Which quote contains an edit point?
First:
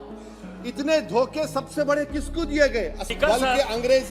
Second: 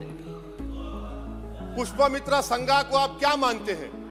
first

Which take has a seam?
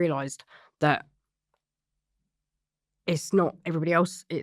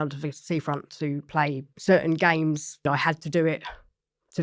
second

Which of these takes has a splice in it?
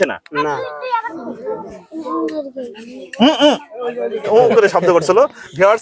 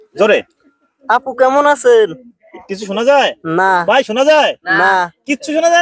first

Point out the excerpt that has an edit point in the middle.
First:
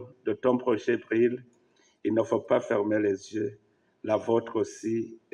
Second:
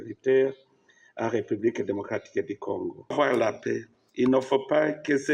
second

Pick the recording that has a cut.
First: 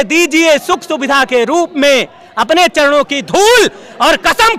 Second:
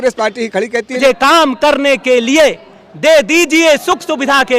second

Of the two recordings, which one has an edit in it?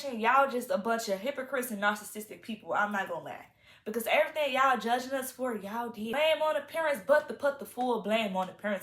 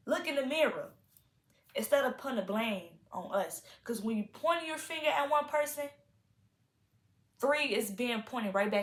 first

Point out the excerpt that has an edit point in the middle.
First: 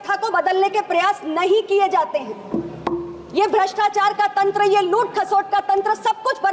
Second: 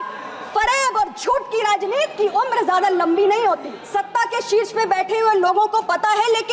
second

